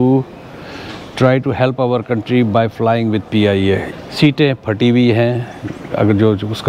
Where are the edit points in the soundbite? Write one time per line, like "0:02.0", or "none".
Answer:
0:03.9